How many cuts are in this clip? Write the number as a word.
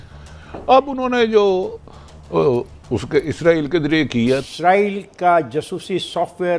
one